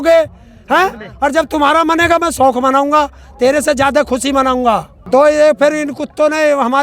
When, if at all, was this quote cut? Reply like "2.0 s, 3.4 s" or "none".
4.9 s